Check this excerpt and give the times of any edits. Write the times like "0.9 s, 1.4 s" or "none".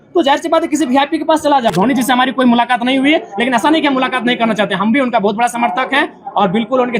1.7 s